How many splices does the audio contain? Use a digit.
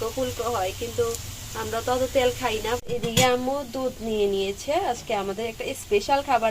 1